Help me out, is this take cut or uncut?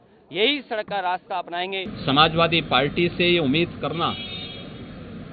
cut